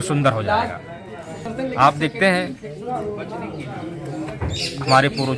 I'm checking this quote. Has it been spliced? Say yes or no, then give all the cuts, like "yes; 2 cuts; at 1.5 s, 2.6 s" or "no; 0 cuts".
no; 0 cuts